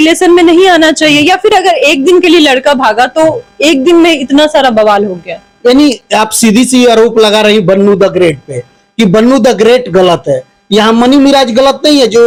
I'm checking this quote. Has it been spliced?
no; 0 cuts

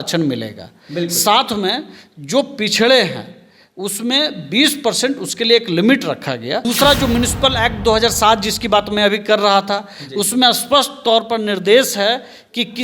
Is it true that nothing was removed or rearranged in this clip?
no; 1 cut; at 6.6 s

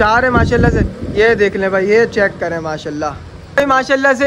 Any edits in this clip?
no; 0 cuts

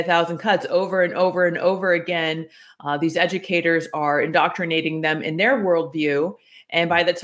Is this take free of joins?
yes; 0 cuts

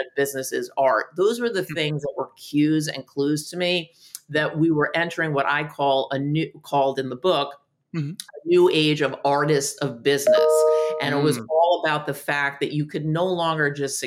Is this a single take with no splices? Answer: yes; 0 cuts

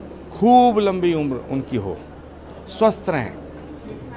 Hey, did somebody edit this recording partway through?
no; 0 cuts

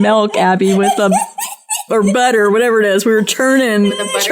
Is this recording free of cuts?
yes; 0 cuts

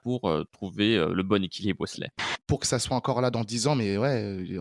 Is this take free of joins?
no; 1 cut; at 2.3 s

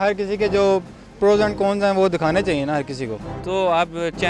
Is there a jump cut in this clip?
yes; 1 cut; at 3.2 s

